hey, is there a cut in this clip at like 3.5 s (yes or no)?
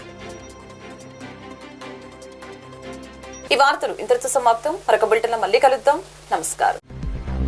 no